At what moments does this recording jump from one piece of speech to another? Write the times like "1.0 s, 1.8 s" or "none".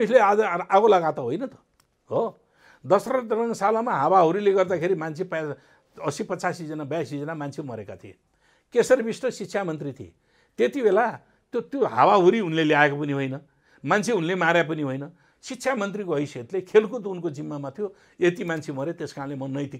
none